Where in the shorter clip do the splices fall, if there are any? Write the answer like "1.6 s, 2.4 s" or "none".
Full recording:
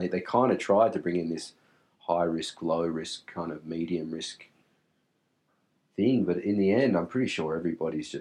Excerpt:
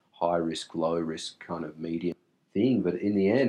2.1 s